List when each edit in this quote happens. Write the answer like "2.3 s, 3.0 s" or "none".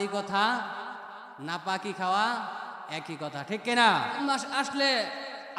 4.2 s